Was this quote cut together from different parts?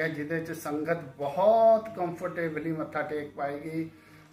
no; 0 cuts

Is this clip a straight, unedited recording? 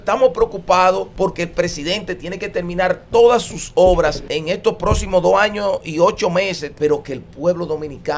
no; 3 cuts; at 1.1 s, 4.3 s, 6.7 s

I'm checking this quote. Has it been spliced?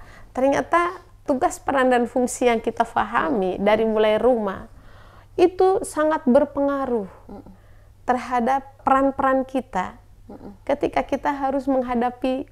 yes; 2 cuts; at 1.2 s, 8.7 s

